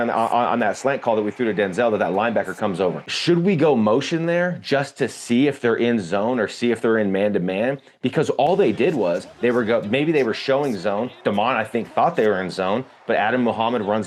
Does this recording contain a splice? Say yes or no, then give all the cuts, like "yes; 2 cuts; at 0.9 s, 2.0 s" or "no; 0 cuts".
no; 0 cuts